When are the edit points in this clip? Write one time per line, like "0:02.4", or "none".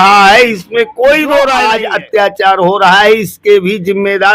0:01.8